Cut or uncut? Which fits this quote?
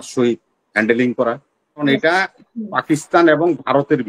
cut